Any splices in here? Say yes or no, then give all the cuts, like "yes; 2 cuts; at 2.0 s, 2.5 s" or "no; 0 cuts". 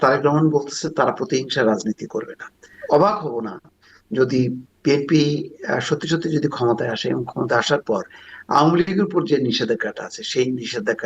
yes; 1 cut; at 2.7 s